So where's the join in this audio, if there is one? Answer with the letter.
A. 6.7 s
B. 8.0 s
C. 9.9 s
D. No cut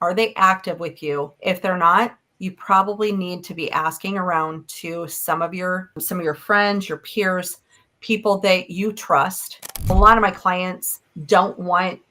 C